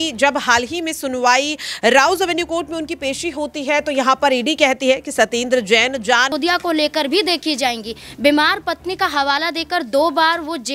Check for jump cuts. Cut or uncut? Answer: cut